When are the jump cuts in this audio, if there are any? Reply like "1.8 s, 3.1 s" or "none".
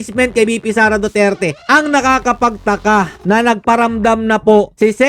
1.6 s